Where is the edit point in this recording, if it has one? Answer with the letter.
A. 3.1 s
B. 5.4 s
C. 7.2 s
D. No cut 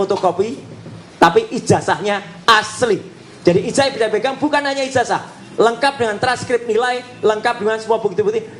D